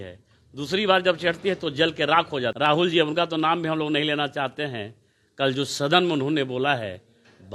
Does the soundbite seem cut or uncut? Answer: cut